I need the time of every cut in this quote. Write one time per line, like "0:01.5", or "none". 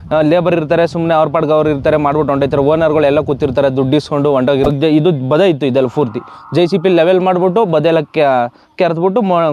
0:04.7

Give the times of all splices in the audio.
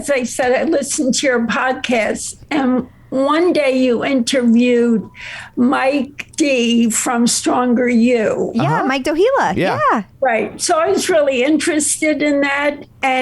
0:06.2

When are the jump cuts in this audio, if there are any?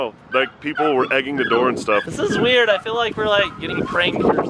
0:02.0

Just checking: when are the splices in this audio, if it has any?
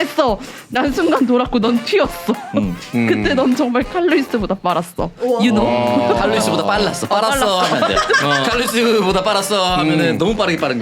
none

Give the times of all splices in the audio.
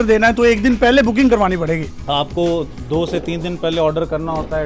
none

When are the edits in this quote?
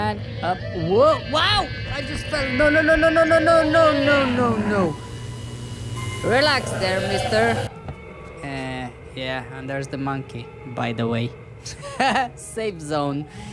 0:07.7

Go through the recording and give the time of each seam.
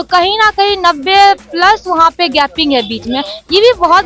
none

